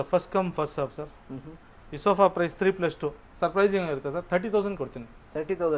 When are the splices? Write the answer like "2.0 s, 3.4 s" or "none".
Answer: none